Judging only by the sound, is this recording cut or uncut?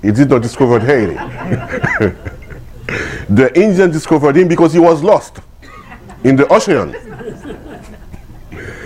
uncut